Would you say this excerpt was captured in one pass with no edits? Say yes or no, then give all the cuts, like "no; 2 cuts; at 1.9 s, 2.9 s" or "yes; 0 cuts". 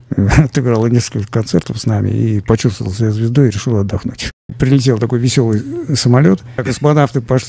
no; 2 cuts; at 4.5 s, 6.7 s